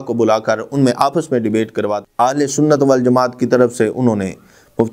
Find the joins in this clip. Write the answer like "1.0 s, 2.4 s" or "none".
2.0 s

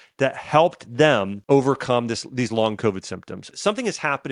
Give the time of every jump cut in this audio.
1.3 s, 3.5 s

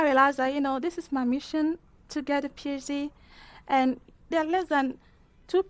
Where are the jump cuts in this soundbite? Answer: 4.3 s

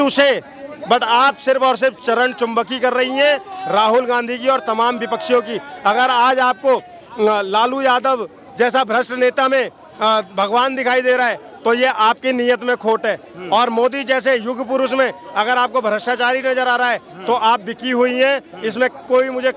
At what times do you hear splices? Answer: none

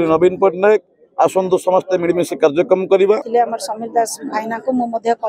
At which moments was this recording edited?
3.2 s

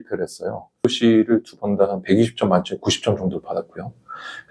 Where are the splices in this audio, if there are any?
0.9 s

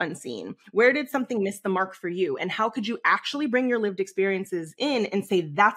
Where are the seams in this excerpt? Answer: none

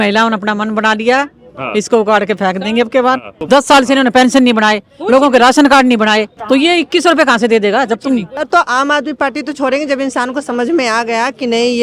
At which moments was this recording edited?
3.3 s, 6.4 s, 8.4 s

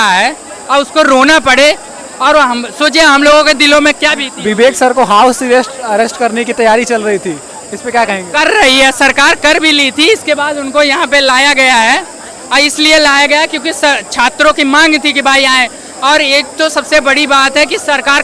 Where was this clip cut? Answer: none

